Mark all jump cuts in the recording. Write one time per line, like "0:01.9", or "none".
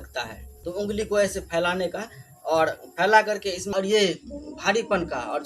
0:03.6